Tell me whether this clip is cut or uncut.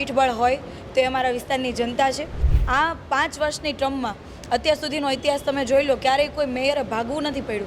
cut